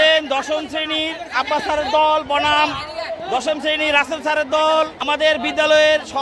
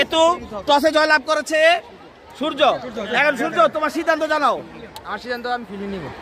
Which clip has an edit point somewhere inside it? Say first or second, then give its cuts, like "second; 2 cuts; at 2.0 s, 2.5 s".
first; 1 cut; at 5.0 s